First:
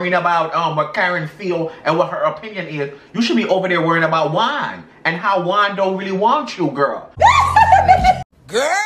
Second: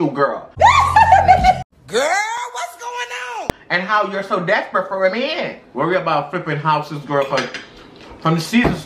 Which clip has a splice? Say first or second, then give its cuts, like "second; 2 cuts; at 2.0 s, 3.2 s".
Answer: second; 1 cut; at 5.6 s